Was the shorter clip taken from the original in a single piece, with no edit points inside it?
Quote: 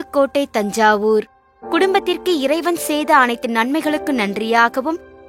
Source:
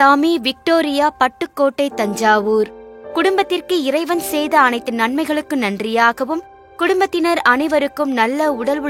yes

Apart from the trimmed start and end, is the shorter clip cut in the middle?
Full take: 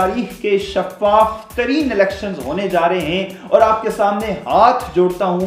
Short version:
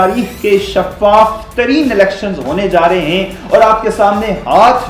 no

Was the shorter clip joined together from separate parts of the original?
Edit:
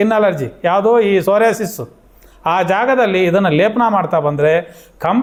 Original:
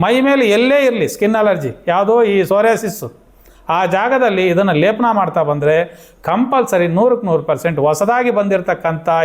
no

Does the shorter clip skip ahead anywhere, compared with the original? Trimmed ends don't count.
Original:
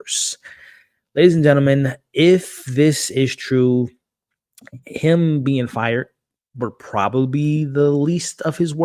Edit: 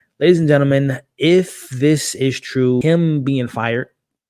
yes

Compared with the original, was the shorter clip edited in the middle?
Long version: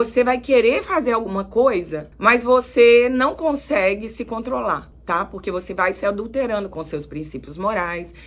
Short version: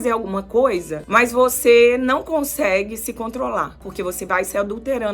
yes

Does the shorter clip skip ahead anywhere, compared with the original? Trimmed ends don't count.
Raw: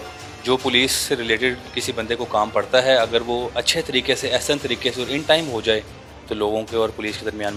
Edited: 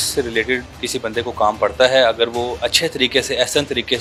no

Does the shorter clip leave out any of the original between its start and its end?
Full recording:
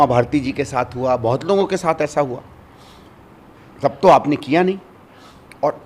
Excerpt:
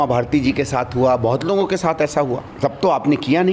yes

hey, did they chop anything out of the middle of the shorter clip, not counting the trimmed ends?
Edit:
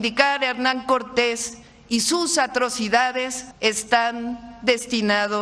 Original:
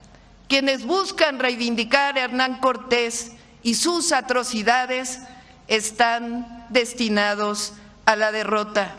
yes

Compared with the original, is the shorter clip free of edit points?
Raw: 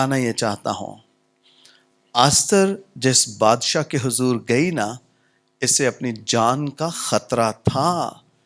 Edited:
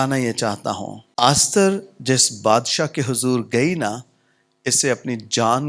no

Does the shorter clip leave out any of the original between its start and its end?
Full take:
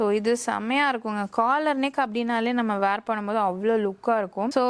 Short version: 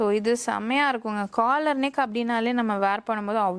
no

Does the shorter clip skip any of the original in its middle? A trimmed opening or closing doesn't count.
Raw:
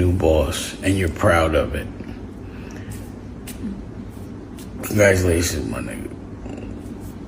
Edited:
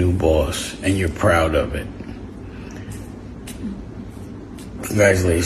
no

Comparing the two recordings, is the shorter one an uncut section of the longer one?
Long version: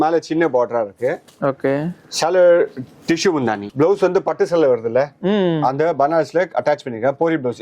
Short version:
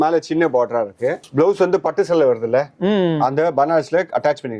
no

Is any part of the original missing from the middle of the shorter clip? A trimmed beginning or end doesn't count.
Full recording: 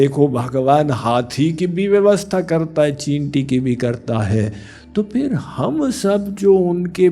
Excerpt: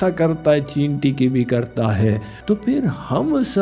yes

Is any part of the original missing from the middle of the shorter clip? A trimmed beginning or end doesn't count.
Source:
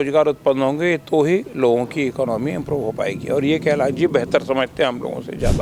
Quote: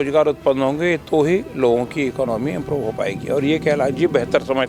no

